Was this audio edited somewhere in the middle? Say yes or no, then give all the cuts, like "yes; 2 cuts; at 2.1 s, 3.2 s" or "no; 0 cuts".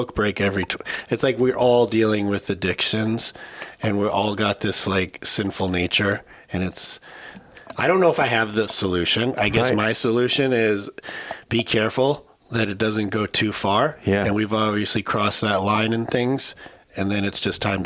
no; 0 cuts